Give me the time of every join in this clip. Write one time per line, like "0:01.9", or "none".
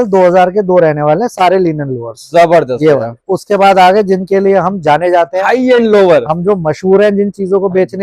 none